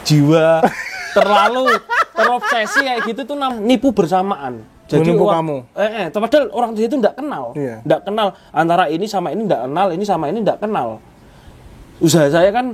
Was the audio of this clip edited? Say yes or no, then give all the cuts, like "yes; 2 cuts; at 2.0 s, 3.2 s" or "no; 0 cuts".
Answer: yes; 1 cut; at 3.5 s